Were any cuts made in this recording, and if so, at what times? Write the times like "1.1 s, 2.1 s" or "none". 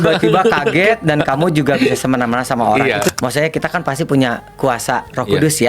3.1 s